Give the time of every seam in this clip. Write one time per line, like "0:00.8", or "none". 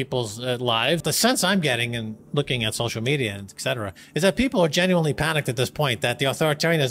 0:01.0